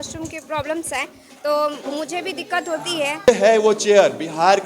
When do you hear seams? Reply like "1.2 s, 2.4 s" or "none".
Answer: 3.3 s